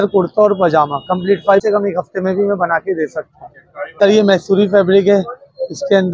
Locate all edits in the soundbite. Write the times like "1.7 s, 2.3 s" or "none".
1.6 s, 3.9 s